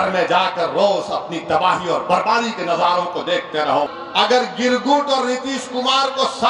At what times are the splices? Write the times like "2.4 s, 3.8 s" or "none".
4.0 s